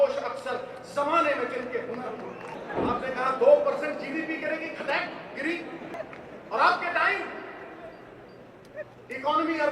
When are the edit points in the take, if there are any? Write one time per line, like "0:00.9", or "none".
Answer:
0:02.5
0:05.9

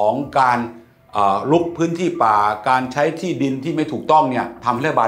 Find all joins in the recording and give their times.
none

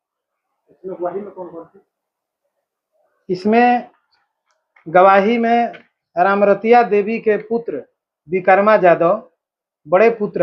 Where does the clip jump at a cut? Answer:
none

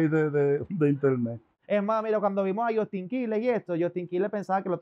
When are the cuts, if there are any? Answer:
0:01.5

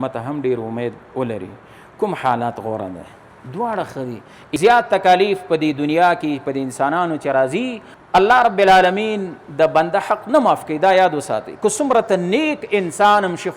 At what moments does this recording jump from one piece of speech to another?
0:04.6
0:07.8

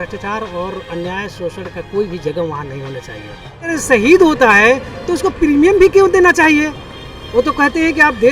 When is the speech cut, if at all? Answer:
0:03.7

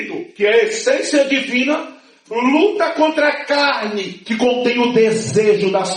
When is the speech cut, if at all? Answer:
none

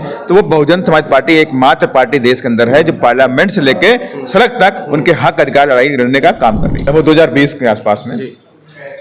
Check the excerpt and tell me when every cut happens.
0:06.9

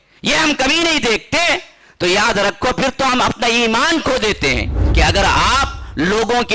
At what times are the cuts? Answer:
0:04.8

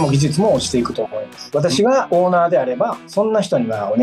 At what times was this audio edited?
none

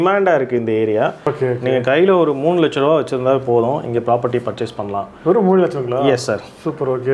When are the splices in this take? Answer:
0:01.2

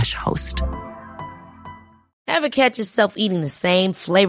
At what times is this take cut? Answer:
0:02.1

